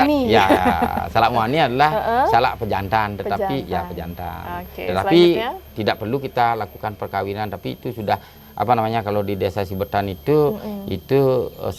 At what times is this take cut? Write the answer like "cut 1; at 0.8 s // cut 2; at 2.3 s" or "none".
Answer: none